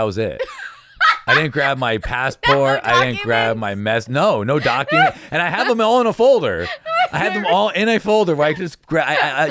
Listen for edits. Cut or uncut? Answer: uncut